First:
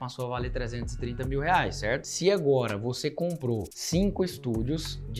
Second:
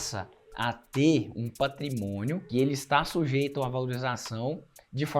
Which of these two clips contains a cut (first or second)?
second